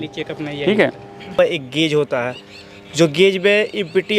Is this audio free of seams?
no; 1 cut; at 1.4 s

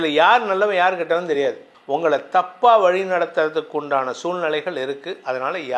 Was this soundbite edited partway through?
yes; 1 cut; at 1.7 s

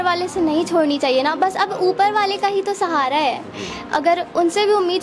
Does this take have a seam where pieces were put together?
no; 0 cuts

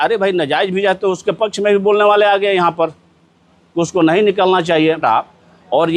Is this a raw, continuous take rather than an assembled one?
no; 1 cut; at 5.0 s

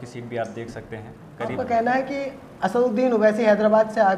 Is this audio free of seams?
no; 1 cut; at 1.5 s

